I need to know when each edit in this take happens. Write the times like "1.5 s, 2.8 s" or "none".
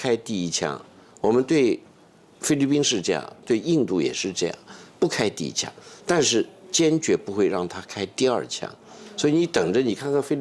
none